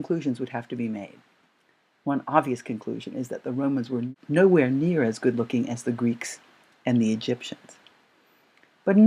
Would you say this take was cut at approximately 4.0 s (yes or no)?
no